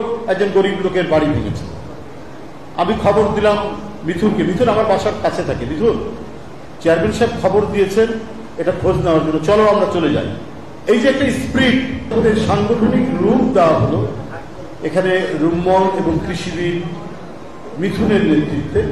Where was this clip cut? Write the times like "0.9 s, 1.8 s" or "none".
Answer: 12.1 s